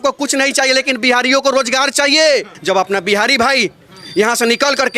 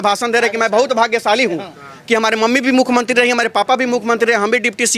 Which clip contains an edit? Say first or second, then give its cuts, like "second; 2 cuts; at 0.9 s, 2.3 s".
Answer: first; 1 cut; at 2.5 s